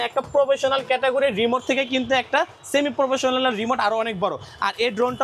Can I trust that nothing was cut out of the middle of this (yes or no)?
yes